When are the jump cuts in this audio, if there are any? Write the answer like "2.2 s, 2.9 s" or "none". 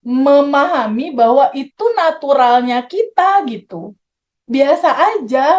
none